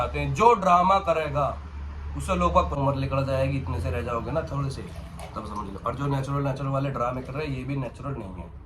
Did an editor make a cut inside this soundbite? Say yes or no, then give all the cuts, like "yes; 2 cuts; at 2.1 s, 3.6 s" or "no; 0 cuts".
yes; 1 cut; at 2.8 s